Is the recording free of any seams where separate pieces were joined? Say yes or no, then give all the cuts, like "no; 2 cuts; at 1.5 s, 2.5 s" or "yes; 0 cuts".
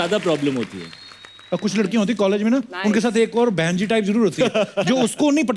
yes; 0 cuts